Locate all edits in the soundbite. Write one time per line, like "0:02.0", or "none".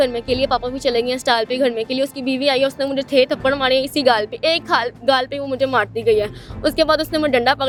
none